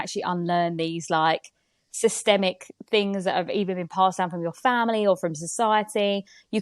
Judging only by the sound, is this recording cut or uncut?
uncut